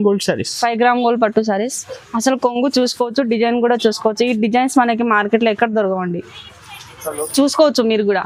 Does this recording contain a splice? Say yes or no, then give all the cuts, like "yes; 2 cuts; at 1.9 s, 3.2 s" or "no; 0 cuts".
no; 0 cuts